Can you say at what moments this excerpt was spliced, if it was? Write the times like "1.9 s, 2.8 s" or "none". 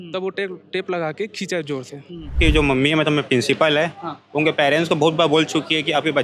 2.4 s